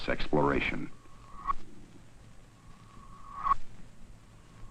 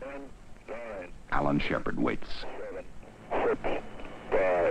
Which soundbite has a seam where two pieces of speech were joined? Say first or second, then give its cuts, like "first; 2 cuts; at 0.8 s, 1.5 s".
first; 1 cut; at 3.2 s